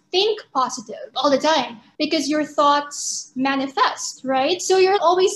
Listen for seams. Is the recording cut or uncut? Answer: cut